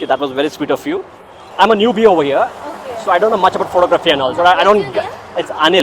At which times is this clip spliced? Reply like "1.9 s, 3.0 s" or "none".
1.4 s